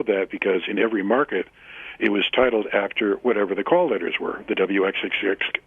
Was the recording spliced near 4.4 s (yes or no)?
no